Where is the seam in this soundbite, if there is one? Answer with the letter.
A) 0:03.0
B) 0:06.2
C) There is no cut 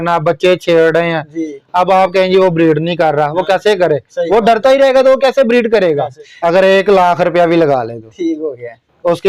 B